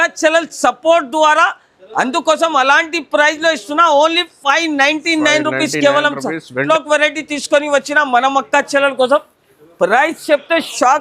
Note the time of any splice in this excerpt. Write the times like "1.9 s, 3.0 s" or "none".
6.6 s

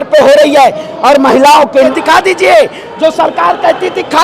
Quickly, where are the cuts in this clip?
1.9 s

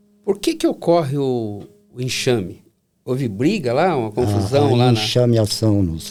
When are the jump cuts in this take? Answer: none

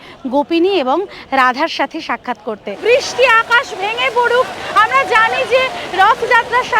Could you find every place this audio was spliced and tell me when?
2.8 s

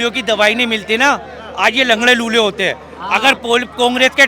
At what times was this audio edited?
none

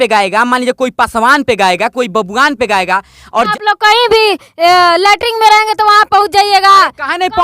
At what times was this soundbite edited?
3.5 s

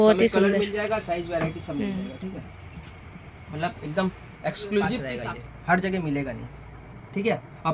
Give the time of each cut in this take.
none

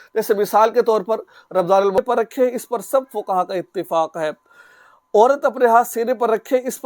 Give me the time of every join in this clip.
2.0 s

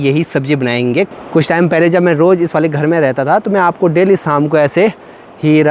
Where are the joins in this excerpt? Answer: 1.1 s

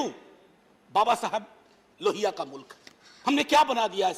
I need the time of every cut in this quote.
none

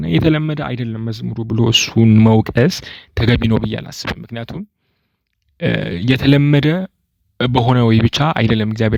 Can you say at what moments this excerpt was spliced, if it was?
none

